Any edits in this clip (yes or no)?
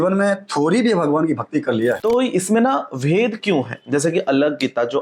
yes